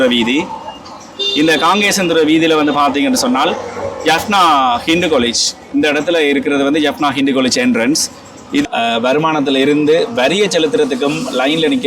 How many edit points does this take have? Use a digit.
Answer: 1